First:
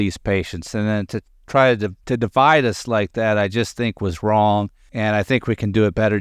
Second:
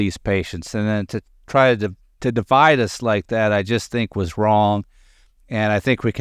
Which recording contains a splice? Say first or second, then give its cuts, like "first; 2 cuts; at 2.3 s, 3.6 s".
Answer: first; 2 cuts; at 1.9 s, 4.8 s